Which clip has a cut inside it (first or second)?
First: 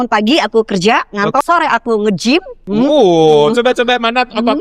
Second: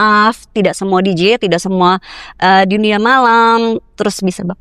first